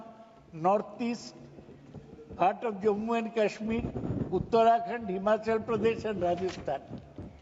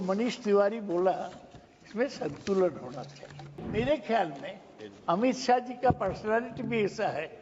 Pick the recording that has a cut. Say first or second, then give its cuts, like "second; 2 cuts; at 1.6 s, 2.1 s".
second; 1 cut; at 3.6 s